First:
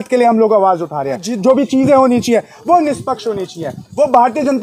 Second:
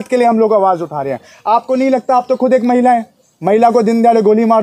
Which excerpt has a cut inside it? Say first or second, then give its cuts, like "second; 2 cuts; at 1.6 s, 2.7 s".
first; 1 cut; at 1.3 s